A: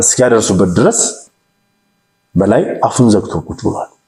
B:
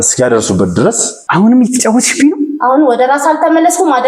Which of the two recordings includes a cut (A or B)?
B